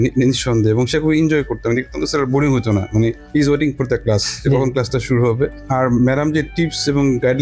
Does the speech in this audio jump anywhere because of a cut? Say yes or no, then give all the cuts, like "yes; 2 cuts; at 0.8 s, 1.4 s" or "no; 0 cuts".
no; 0 cuts